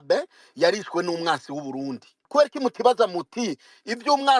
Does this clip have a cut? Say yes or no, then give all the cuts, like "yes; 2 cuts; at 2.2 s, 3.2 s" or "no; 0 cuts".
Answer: yes; 1 cut; at 2.2 s